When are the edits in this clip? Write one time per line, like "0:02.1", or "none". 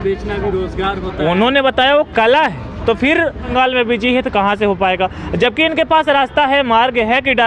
0:03.5